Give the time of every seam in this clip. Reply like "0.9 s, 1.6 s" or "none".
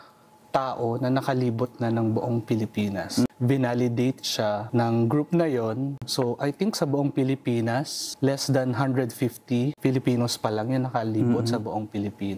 3.3 s, 4.7 s, 6.1 s, 8.0 s, 9.8 s